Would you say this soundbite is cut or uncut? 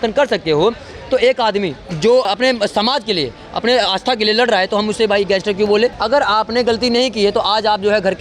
cut